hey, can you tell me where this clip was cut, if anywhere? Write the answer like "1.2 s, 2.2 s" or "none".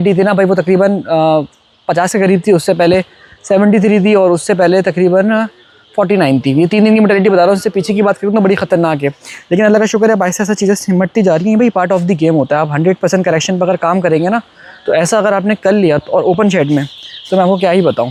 none